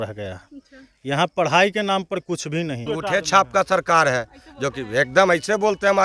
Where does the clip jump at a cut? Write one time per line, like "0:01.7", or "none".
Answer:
0:02.9

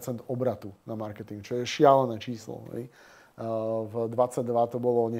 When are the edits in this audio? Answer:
none

